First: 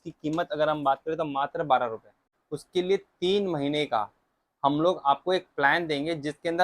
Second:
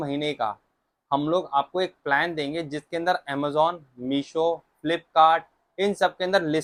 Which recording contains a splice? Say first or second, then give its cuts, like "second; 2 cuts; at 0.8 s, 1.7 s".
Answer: first; 1 cut; at 2.2 s